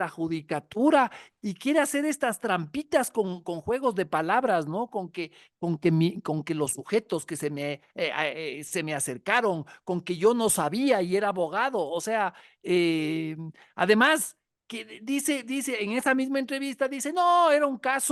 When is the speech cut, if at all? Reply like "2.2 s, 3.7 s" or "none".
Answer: none